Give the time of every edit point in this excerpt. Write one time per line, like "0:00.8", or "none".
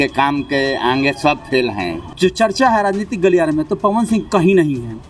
0:02.0